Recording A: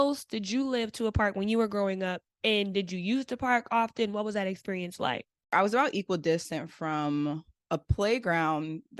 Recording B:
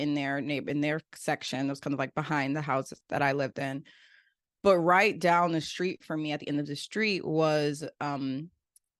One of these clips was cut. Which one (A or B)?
A